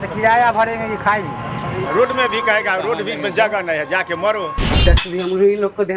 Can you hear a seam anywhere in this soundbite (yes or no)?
yes